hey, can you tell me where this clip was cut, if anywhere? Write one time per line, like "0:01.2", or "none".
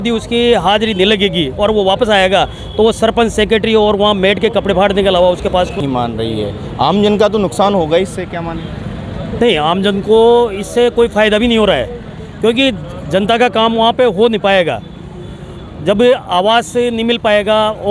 0:05.8